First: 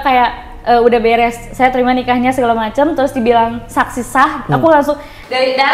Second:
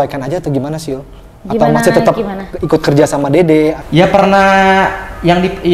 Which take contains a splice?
second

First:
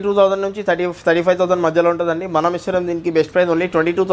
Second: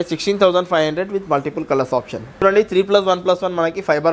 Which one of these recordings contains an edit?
second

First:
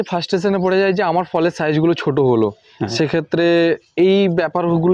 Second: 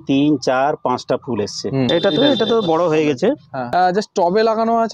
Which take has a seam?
second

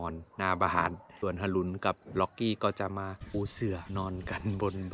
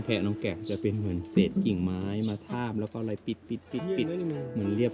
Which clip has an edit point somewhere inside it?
first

